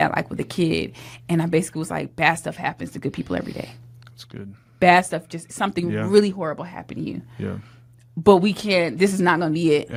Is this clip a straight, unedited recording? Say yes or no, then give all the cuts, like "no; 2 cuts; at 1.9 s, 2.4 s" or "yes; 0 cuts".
yes; 0 cuts